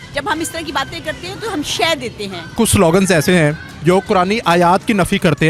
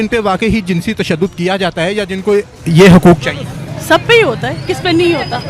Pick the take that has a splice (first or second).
first